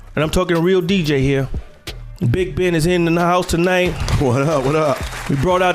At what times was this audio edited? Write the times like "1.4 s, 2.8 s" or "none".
2.5 s